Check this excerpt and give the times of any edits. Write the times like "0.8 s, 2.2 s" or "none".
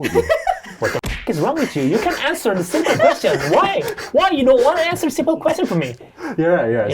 none